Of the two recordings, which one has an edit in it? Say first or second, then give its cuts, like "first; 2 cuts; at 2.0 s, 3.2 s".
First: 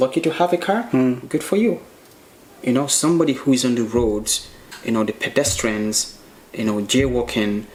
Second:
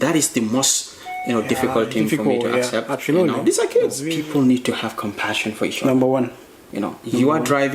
second; 1 cut; at 4.0 s